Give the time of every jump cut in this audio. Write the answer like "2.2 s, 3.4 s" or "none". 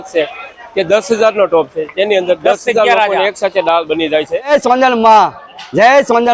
4.4 s